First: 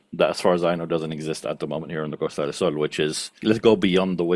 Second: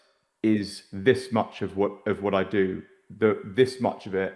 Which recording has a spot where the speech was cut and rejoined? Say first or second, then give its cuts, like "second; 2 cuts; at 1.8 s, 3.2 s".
first; 1 cut; at 3.4 s